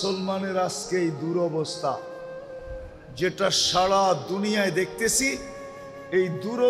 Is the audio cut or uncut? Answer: uncut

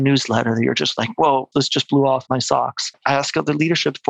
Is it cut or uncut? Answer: cut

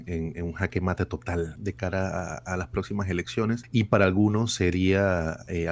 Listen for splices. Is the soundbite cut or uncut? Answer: cut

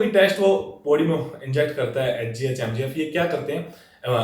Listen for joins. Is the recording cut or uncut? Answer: uncut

